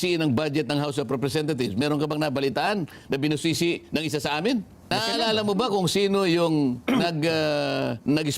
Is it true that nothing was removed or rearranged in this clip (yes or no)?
no